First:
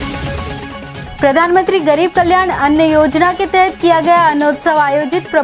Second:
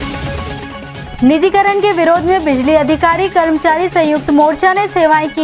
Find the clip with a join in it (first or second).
first